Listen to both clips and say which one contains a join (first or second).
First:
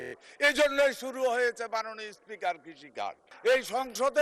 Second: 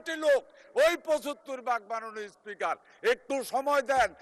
first